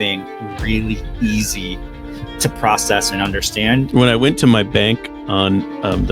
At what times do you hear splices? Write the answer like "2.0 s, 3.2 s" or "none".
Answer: 3.9 s